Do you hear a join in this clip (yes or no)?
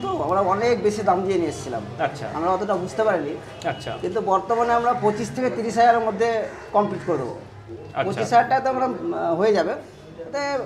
no